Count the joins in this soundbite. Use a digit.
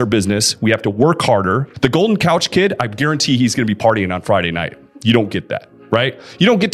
1